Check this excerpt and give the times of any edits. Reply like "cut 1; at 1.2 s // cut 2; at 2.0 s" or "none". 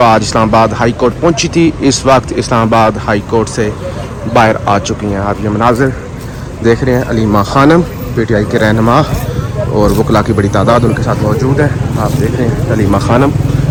none